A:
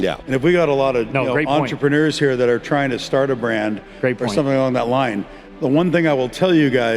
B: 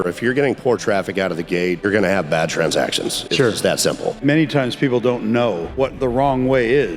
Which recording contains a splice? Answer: B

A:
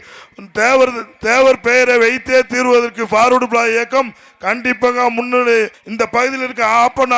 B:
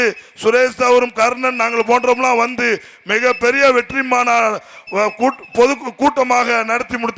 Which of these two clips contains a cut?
A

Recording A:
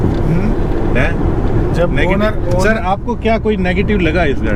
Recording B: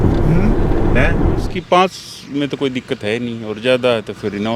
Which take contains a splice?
B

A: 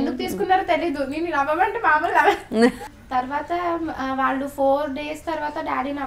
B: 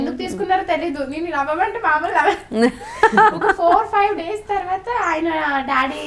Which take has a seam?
A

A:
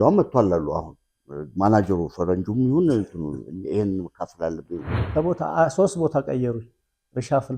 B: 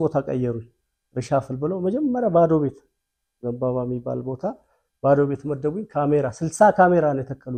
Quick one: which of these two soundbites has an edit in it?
A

